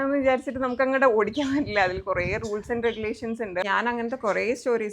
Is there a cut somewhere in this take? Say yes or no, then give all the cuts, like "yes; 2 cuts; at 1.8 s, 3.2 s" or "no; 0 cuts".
yes; 1 cut; at 3.6 s